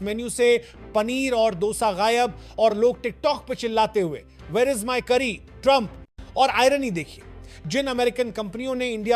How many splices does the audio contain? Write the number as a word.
zero